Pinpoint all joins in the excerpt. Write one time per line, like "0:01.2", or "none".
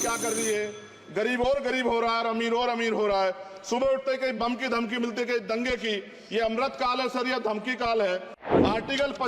0:08.4